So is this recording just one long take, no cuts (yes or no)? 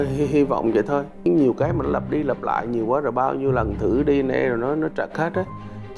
yes